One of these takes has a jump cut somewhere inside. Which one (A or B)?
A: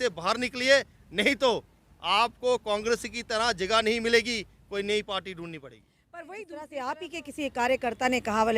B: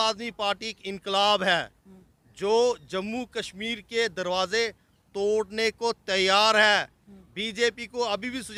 A